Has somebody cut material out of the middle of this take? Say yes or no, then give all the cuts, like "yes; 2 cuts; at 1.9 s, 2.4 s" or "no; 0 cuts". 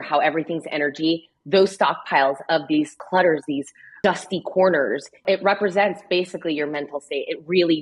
yes; 3 cuts; at 3.0 s, 4.0 s, 5.1 s